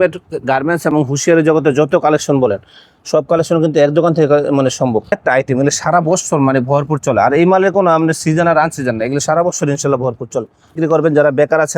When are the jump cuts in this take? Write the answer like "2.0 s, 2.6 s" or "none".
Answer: 5.1 s, 10.7 s